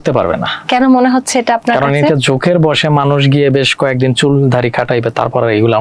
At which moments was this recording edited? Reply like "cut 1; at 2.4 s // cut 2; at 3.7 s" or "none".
none